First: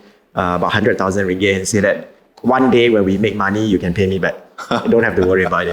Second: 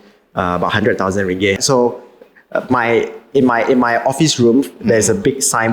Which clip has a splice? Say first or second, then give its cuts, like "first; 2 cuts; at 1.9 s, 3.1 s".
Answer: second; 1 cut; at 1.6 s